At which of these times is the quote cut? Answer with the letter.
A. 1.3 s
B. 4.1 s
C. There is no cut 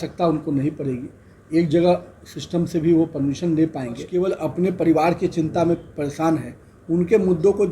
B